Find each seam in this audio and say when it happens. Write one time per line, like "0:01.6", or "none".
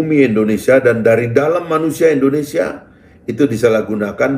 none

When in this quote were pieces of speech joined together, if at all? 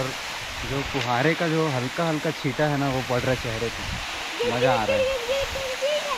none

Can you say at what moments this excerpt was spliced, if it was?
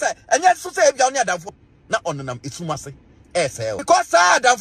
0:01.5
0:03.8

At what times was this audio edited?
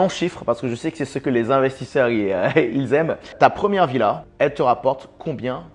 0:03.3
0:04.3

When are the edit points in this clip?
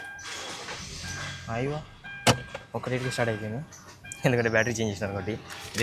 none

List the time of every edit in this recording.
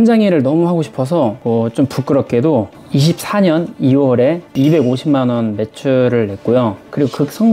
0:01.4

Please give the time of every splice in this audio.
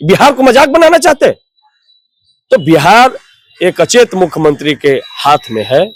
none

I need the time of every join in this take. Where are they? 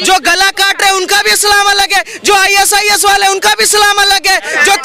none

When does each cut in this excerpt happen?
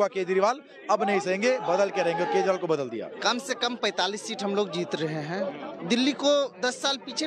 0:03.1
0:05.7

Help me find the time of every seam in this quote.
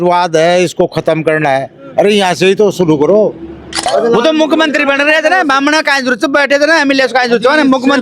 0:03.9

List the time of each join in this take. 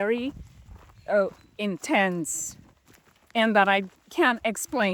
none

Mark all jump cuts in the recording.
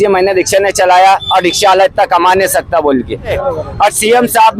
0:03.4

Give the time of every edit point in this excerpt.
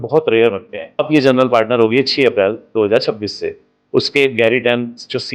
0:01.1

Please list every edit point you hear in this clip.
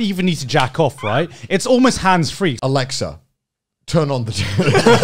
0:02.6

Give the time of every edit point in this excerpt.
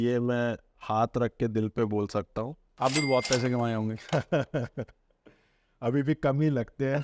0:02.6

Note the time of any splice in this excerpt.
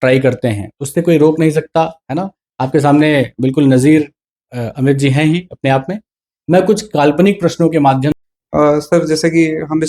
0:08.3

